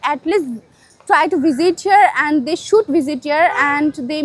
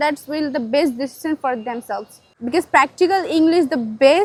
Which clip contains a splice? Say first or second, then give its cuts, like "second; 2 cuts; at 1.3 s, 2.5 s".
first; 1 cut; at 2.9 s